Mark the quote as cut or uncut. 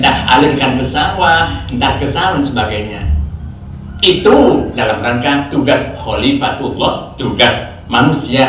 uncut